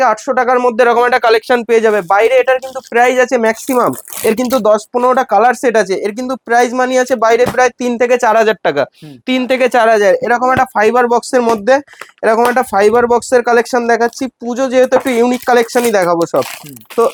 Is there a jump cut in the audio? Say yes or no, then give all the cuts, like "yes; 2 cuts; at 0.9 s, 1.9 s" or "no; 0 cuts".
no; 0 cuts